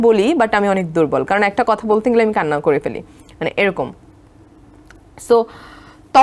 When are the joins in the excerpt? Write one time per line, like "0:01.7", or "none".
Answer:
none